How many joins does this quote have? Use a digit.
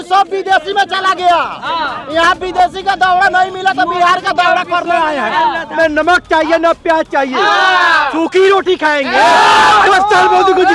1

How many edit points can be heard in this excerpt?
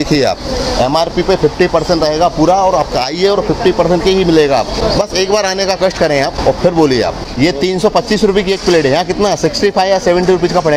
3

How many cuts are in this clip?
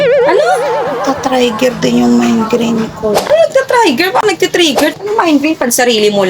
1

